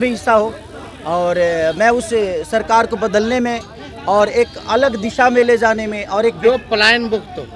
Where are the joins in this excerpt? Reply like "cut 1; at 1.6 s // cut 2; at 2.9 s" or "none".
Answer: cut 1; at 6.4 s